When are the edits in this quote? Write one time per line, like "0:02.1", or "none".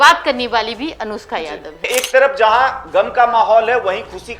0:01.9